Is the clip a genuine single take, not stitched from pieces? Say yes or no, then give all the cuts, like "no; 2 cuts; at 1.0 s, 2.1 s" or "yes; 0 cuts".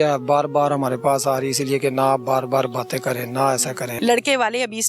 no; 1 cut; at 3.9 s